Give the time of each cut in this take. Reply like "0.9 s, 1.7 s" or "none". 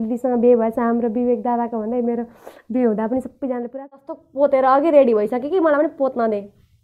4.0 s